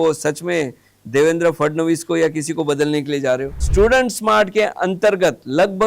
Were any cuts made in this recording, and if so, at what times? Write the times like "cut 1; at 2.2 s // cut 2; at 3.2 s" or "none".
cut 1; at 3.6 s

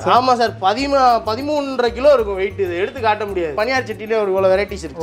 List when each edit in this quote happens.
cut 1; at 3.5 s

